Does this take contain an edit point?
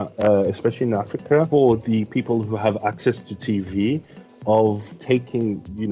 yes; 2 cuts; at 1.5 s, 4.9 s

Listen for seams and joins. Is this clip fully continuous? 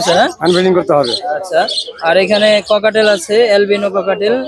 yes; 0 cuts

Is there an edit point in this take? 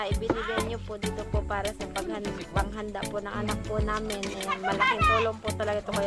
no; 0 cuts

